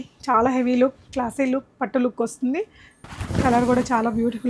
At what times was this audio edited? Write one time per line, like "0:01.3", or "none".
0:03.0